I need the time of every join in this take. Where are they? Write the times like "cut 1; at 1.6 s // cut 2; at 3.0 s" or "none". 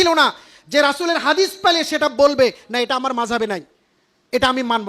none